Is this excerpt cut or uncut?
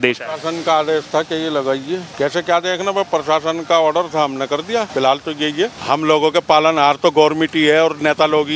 cut